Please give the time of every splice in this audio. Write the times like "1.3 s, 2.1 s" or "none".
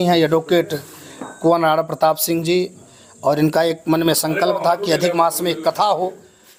none